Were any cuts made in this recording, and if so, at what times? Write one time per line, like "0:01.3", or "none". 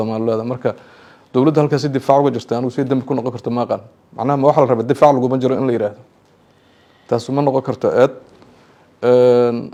none